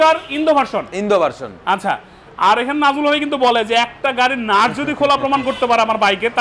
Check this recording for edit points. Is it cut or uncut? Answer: uncut